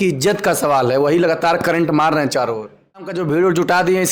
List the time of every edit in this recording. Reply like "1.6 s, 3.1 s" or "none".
3.1 s